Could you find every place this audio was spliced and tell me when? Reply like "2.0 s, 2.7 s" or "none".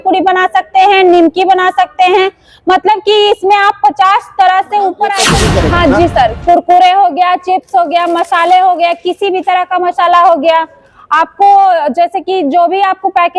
5.3 s

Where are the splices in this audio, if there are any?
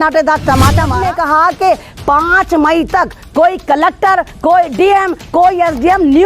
1.0 s

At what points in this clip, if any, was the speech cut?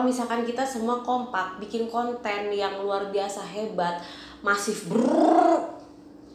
none

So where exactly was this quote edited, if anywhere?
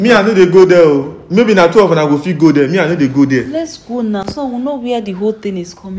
none

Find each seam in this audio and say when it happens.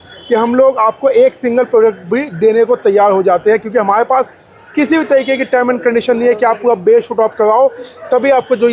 none

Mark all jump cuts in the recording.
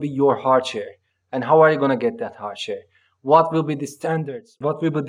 none

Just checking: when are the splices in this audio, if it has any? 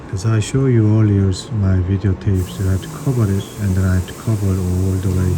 none

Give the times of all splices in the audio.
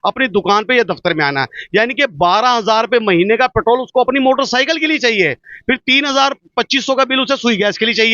none

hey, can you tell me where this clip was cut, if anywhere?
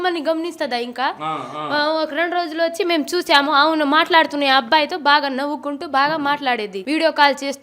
6.7 s

